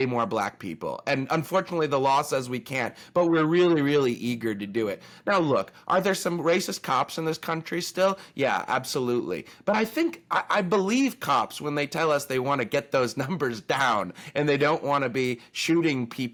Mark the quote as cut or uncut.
uncut